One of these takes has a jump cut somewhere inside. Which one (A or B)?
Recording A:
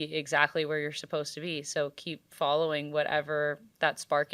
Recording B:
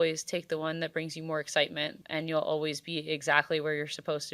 B